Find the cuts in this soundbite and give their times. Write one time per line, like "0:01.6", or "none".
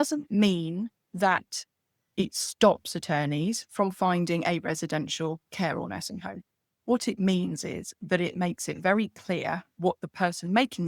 none